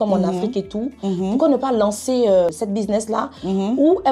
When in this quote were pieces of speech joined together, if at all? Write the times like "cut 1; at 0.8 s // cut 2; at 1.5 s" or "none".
cut 1; at 2.5 s